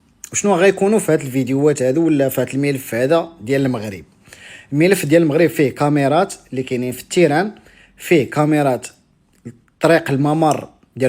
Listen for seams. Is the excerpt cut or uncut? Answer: uncut